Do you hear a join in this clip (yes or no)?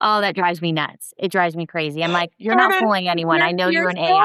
no